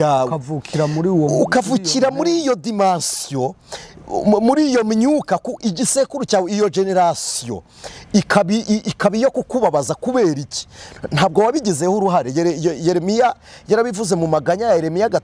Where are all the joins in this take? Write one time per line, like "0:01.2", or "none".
none